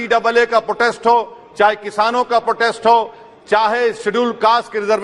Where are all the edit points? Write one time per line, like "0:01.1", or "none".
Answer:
none